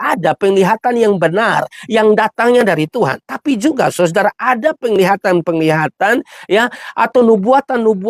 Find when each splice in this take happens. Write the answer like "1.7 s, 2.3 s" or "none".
none